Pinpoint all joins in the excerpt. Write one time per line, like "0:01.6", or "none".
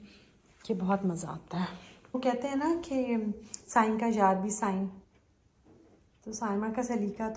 0:02.2